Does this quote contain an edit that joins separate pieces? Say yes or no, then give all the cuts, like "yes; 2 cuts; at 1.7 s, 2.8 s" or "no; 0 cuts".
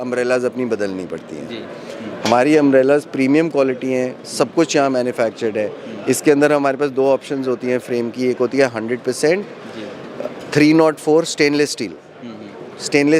no; 0 cuts